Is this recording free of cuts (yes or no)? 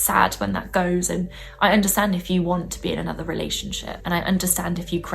no